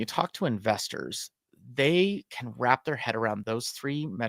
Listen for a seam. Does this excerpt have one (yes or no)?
no